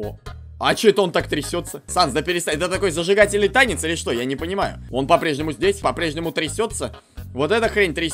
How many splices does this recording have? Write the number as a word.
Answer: three